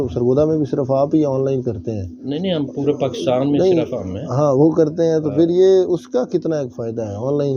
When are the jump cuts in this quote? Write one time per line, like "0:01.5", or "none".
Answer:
none